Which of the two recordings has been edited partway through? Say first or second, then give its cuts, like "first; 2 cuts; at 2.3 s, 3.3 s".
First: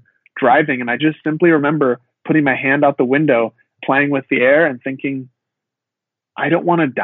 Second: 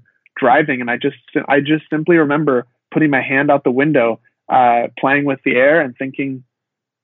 first; 2 cuts; at 1.0 s, 3.8 s